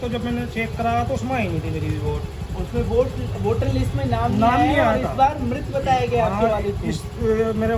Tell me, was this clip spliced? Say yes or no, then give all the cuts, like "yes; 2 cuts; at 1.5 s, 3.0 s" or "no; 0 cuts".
no; 0 cuts